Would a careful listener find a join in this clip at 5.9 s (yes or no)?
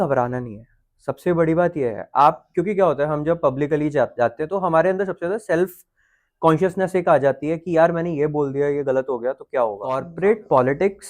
no